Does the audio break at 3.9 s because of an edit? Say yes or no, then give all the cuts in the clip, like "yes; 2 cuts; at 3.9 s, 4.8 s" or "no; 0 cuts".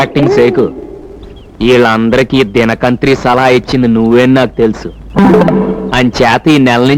no; 0 cuts